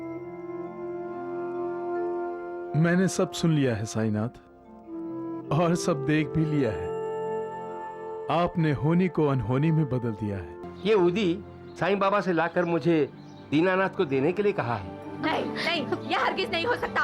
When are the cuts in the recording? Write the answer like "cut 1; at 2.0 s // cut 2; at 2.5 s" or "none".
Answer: cut 1; at 10.6 s // cut 2; at 15.0 s